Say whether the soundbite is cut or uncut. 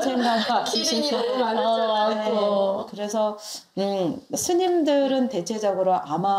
uncut